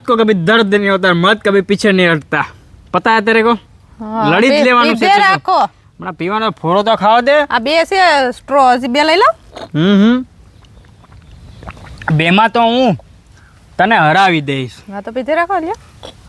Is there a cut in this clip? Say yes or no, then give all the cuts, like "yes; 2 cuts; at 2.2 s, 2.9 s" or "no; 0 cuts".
no; 0 cuts